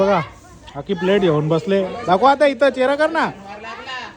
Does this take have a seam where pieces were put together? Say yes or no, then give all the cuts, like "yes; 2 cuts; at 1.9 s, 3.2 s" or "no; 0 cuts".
no; 0 cuts